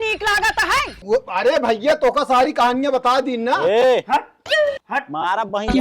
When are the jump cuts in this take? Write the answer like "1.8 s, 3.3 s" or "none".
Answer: 0.9 s